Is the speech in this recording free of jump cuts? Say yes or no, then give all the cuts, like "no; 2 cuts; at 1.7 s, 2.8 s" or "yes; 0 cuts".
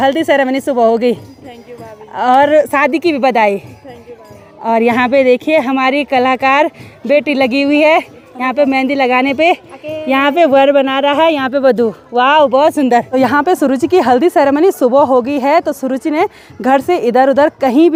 yes; 0 cuts